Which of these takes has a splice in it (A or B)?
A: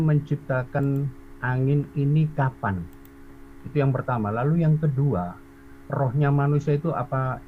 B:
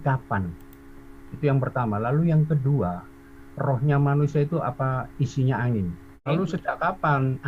B